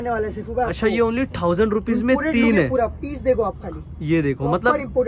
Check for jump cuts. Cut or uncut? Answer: uncut